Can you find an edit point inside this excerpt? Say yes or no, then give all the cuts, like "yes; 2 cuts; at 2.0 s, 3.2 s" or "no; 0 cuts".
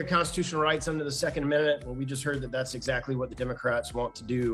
no; 0 cuts